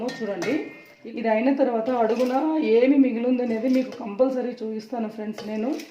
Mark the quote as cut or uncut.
cut